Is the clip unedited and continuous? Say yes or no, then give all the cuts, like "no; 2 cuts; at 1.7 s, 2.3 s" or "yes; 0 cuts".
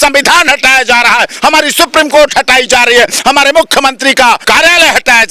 no; 1 cut; at 4.4 s